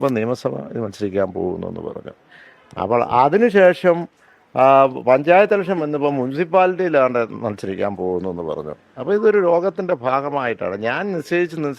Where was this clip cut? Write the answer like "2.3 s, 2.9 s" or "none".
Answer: none